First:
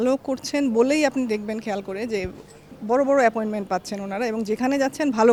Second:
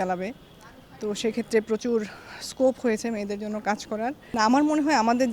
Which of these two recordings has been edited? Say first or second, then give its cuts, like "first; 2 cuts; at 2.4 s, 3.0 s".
second; 1 cut; at 4.2 s